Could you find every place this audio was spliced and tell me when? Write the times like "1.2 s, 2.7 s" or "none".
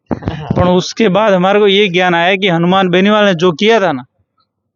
none